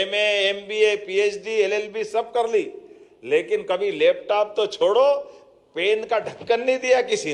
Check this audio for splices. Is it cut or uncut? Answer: uncut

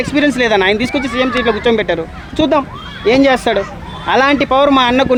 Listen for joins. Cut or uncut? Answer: uncut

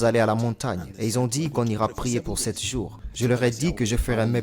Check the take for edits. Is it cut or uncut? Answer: cut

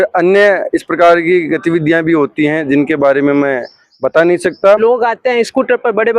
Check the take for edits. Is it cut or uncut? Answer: cut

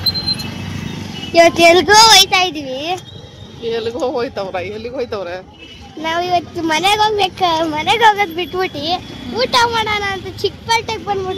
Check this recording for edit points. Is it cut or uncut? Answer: uncut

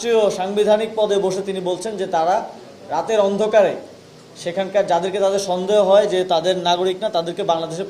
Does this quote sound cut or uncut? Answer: uncut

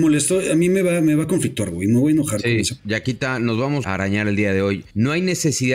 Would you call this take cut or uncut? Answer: cut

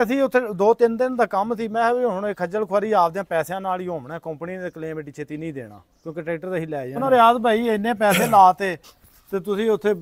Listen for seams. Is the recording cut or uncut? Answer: cut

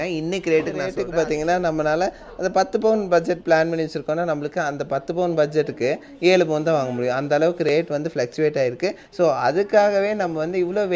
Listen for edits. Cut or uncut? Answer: cut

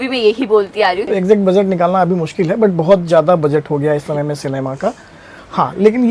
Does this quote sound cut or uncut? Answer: cut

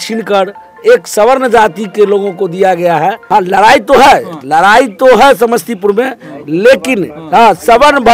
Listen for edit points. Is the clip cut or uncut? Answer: cut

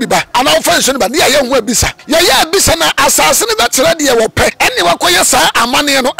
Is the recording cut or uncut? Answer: cut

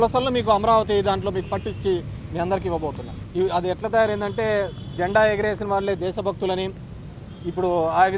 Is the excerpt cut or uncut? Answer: cut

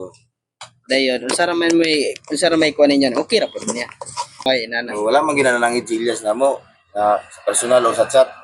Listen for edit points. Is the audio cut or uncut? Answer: cut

